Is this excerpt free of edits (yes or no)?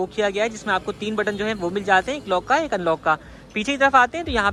yes